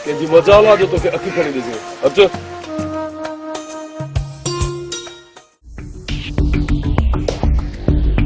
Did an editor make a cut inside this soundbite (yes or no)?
no